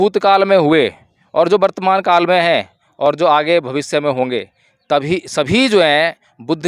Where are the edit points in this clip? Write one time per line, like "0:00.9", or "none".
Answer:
none